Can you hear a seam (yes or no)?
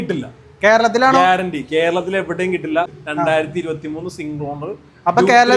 yes